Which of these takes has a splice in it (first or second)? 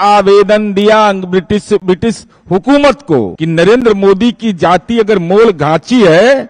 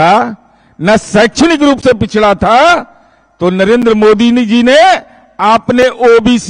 first